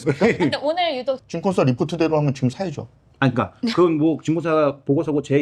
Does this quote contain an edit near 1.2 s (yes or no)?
yes